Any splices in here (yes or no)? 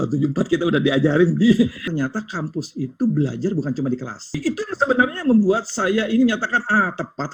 yes